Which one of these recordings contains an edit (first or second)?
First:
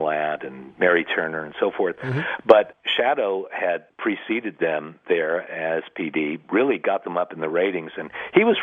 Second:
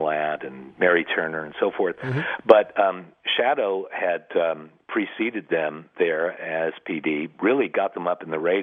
first